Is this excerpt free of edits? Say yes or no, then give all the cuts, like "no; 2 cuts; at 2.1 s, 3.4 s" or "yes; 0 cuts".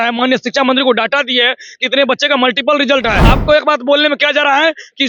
no; 1 cut; at 3.3 s